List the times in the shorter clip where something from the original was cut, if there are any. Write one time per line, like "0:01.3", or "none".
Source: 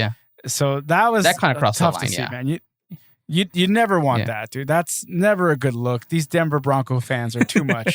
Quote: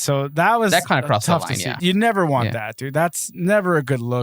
0:01.8